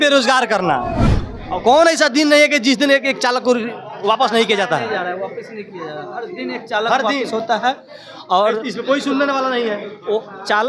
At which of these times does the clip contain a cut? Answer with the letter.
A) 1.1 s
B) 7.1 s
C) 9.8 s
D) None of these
A